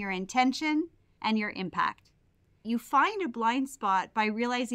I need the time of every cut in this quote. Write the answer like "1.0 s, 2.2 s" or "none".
2.6 s